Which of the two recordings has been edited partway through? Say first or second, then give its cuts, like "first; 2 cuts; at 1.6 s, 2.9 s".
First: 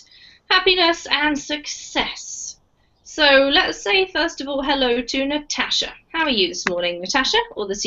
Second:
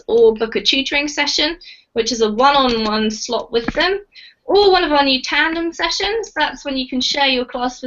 second; 1 cut; at 4.1 s